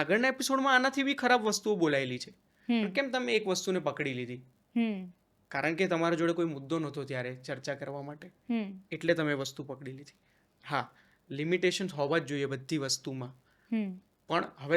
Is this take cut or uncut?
uncut